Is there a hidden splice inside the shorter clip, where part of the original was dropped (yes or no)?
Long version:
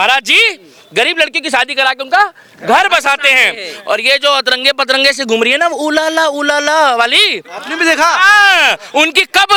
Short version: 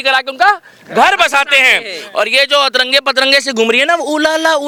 no